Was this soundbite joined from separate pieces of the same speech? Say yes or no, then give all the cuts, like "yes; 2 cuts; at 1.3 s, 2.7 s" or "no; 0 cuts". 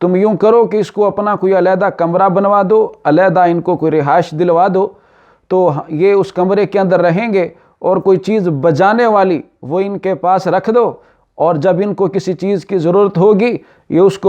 no; 0 cuts